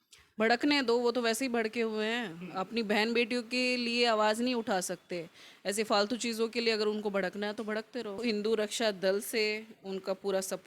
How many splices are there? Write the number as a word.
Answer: one